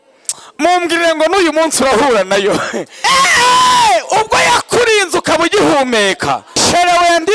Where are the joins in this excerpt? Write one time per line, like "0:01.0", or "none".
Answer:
0:02.8
0:06.5